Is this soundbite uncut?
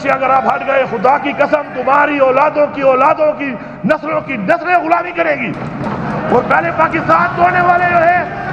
yes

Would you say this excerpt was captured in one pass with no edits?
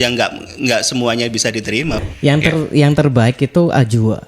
no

